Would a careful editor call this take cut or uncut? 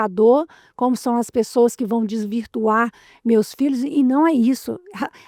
uncut